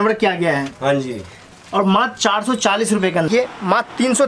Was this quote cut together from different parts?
yes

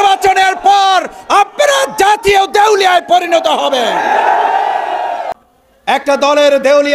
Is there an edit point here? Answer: yes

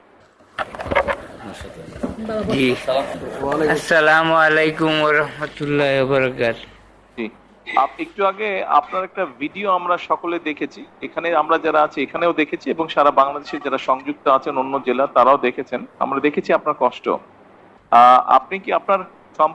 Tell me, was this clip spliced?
no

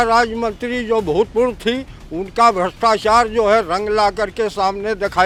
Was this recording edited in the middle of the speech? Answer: no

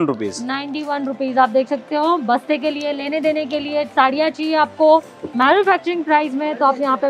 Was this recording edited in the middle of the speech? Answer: no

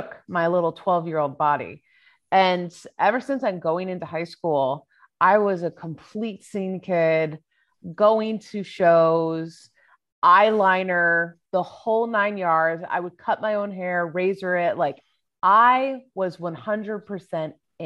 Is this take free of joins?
yes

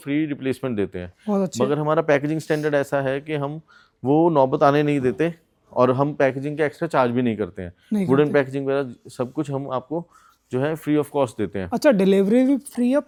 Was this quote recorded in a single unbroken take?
yes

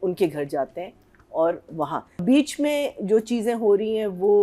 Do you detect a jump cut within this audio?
yes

